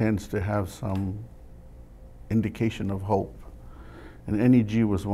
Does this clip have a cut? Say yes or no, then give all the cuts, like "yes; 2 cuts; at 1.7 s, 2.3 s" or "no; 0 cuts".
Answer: no; 0 cuts